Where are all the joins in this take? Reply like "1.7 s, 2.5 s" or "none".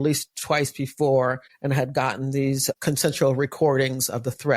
1.5 s, 2.8 s